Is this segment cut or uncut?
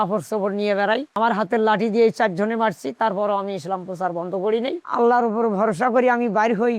cut